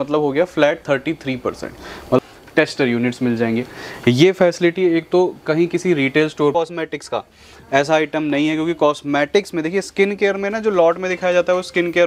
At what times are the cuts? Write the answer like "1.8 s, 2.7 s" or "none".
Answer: 2.2 s, 6.5 s